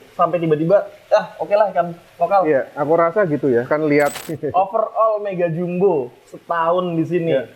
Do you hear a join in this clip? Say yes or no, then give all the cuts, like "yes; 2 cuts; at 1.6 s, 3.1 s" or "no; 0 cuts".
yes; 1 cut; at 4.2 s